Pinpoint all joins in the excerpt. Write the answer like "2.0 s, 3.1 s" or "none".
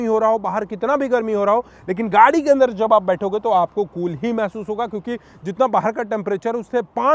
none